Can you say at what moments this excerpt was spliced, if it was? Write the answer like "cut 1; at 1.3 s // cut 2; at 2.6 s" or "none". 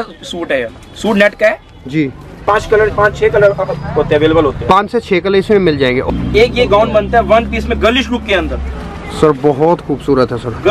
cut 1; at 2.4 s // cut 2; at 6.0 s